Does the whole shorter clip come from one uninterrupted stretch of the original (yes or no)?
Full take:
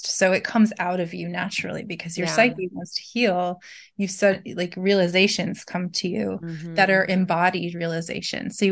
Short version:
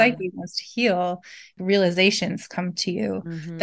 no